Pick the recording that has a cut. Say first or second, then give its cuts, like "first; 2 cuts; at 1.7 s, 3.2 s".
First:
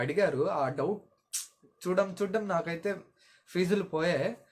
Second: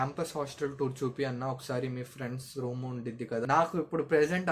second; 1 cut; at 3.5 s